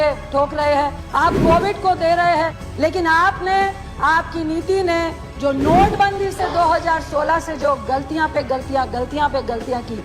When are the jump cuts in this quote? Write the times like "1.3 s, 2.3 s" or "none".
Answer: 1.0 s, 2.6 s